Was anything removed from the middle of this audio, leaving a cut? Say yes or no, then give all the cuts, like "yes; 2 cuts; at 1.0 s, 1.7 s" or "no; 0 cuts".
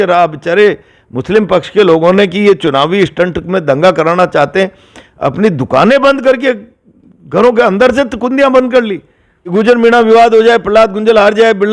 yes; 1 cut; at 9.5 s